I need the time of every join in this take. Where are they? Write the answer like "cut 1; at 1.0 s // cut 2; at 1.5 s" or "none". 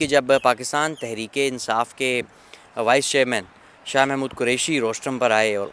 none